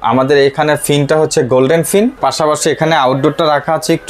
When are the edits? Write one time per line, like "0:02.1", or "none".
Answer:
0:02.2